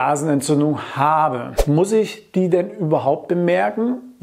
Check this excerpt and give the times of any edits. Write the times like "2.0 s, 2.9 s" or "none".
1.5 s